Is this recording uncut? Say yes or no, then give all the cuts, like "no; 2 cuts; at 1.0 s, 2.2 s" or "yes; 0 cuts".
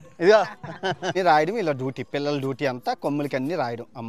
no; 1 cut; at 1.1 s